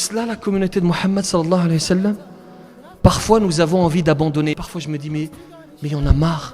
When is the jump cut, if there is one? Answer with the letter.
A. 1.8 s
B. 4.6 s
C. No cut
B